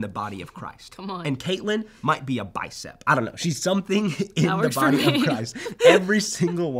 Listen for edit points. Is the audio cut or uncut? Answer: uncut